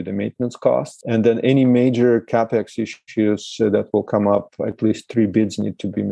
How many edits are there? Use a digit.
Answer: 1